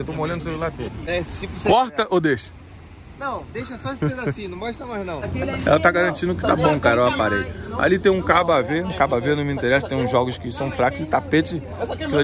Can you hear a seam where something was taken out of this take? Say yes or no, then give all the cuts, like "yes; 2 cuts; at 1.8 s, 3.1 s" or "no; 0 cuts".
yes; 2 cuts; at 1.1 s, 5.3 s